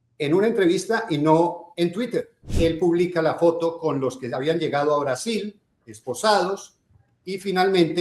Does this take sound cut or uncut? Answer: cut